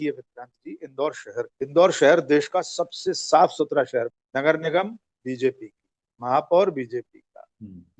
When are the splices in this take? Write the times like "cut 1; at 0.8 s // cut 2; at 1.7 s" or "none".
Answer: cut 1; at 1.5 s // cut 2; at 4.2 s